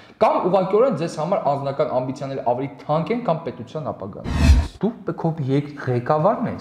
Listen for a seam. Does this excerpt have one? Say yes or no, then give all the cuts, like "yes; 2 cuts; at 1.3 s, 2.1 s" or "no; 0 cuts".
yes; 1 cut; at 4.3 s